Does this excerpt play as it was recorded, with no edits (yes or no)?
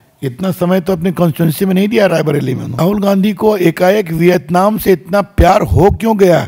no